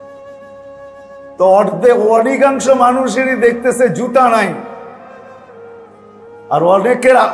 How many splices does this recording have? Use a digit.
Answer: 1